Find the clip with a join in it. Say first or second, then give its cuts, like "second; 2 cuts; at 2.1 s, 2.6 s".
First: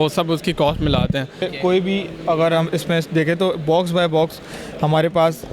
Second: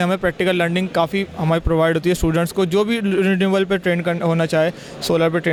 first; 1 cut; at 1.5 s